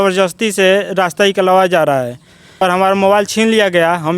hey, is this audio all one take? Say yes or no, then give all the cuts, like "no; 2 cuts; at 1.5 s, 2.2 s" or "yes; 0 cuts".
no; 1 cut; at 2.6 s